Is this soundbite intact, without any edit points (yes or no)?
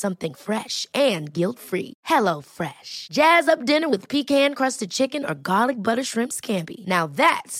yes